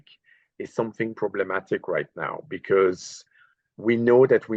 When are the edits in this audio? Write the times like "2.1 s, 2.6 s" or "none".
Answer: none